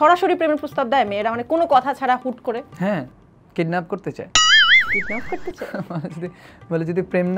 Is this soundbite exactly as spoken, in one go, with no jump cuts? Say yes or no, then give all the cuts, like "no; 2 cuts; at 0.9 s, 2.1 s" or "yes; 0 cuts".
yes; 0 cuts